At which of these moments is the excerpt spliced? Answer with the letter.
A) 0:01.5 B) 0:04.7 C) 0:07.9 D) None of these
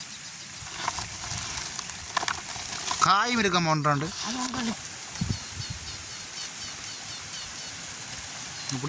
B